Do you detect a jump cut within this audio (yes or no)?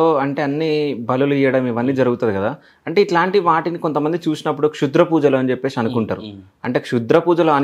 no